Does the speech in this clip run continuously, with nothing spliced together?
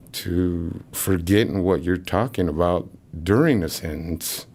yes; 0 cuts

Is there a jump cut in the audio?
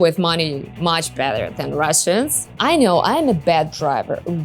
yes; 1 cut; at 2.4 s

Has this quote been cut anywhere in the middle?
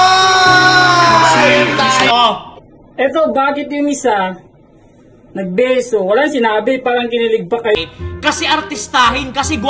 yes; 1 cut; at 7.8 s

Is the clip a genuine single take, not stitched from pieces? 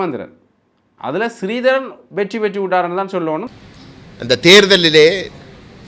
no; 1 cut; at 3.5 s

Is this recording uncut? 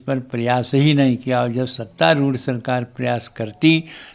yes; 0 cuts

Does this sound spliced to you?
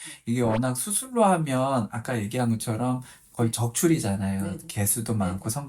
no; 0 cuts

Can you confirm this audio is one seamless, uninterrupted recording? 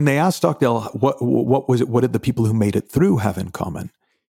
yes; 0 cuts

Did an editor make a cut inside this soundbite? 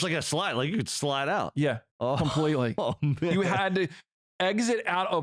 yes; 1 cut; at 3.3 s

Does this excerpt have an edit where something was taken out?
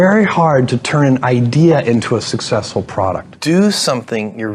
yes; 1 cut; at 3.5 s

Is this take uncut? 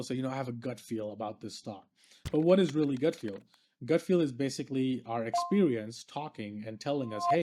yes; 0 cuts

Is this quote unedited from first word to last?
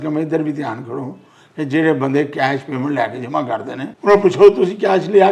no; 1 cut; at 3.9 s

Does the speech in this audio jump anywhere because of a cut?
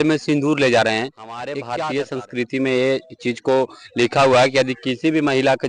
yes; 1 cut; at 1.5 s

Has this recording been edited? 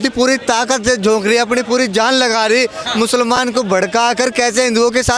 no; 0 cuts

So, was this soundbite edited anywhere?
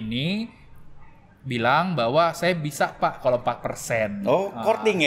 no; 0 cuts

